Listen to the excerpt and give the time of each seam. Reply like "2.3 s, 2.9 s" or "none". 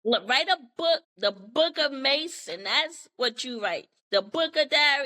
1.1 s, 3.9 s